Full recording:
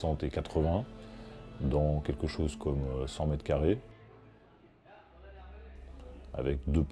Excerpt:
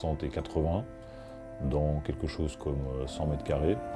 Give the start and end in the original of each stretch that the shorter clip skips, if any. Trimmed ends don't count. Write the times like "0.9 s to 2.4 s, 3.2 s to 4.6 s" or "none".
none